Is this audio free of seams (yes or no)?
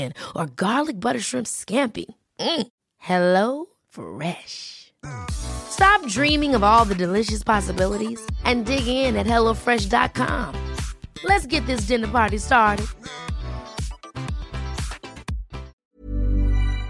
no